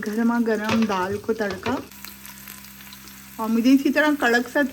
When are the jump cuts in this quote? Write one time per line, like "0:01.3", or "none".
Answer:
0:01.9